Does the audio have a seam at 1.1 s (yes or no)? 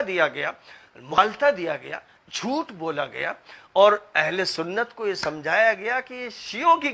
yes